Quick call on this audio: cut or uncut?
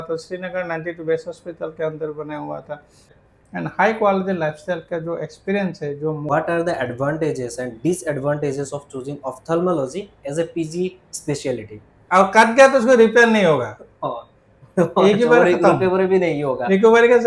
cut